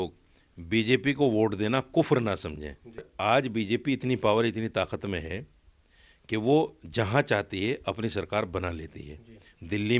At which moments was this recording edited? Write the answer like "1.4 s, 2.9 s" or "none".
3.1 s